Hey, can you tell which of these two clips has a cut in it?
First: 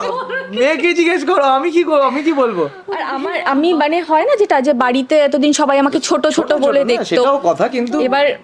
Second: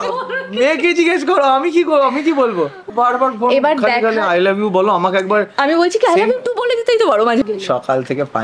second; 2 cuts; at 2.9 s, 7.4 s

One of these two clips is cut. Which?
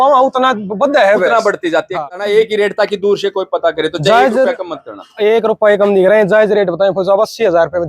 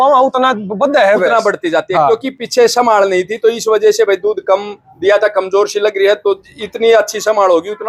first; 1 cut; at 1.8 s

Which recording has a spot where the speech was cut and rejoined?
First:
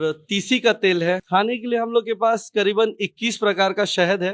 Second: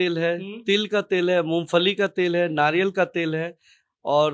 first; 1 cut; at 1.2 s

